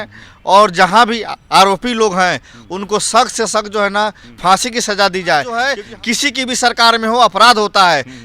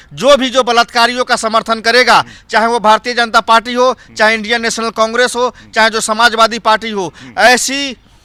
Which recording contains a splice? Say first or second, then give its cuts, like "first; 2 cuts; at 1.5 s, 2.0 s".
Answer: first; 1 cut; at 5.8 s